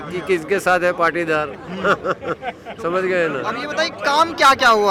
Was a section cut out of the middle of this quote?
no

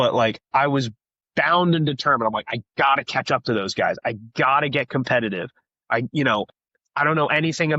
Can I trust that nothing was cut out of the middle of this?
yes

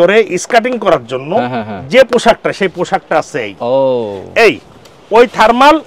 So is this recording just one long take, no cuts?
yes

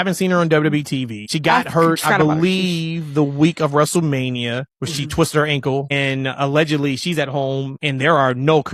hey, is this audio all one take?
yes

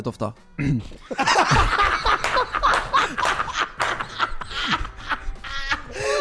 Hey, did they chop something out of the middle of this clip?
no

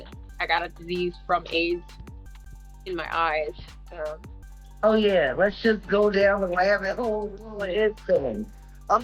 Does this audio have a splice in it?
yes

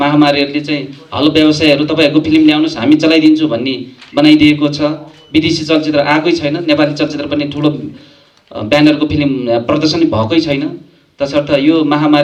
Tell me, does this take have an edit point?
no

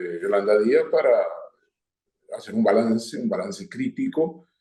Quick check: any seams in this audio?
no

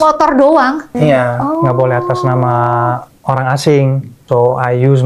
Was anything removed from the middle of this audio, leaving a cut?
yes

